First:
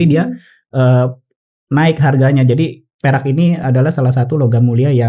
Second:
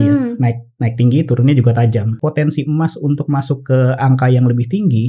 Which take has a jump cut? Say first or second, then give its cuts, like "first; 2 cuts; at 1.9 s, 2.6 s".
second; 1 cut; at 2.1 s